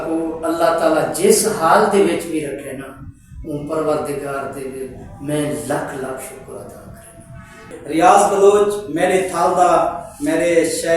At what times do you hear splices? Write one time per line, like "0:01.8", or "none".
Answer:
0:07.8

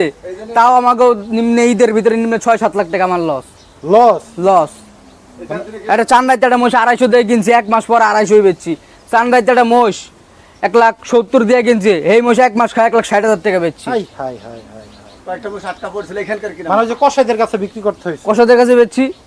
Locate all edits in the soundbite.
none

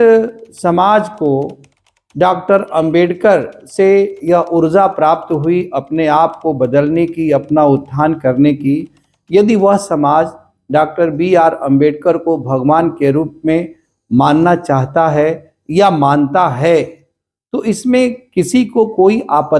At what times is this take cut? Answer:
none

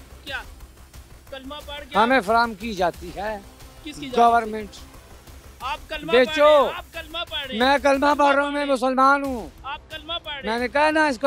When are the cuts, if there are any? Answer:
none

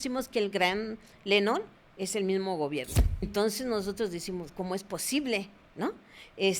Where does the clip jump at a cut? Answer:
0:03.3

